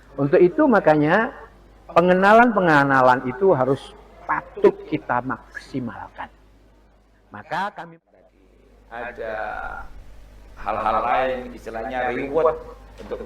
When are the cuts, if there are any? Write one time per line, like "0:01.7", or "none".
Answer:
0:08.0